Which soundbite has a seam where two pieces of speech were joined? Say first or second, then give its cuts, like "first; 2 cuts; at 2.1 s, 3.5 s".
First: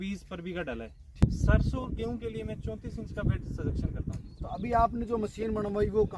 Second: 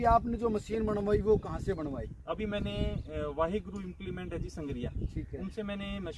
first; 1 cut; at 1.2 s